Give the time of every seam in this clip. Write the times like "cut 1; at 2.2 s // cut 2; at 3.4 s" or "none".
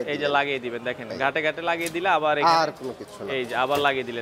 none

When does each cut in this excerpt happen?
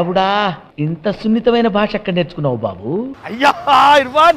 cut 1; at 3.2 s

